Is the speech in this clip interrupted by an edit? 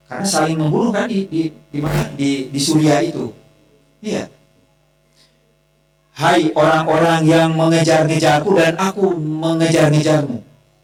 no; 0 cuts

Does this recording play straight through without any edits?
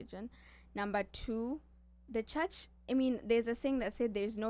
yes; 0 cuts

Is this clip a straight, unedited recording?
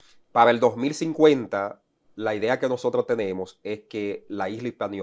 yes; 0 cuts

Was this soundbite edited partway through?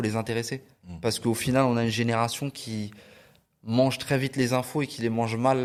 no; 0 cuts

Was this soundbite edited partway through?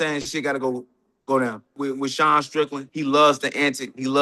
yes; 2 cuts; at 1.7 s, 2.8 s

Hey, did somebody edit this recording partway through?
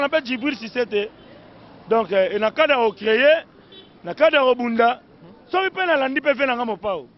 no; 0 cuts

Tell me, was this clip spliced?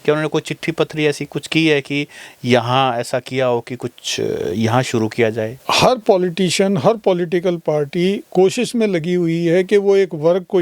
yes; 1 cut; at 5.6 s

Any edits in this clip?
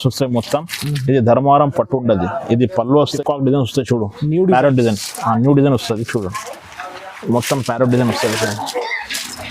yes; 1 cut; at 3.1 s

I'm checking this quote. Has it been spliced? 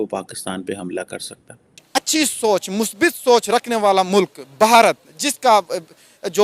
yes; 1 cut; at 1.8 s

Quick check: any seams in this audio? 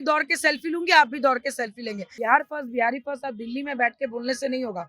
yes; 1 cut; at 2.2 s

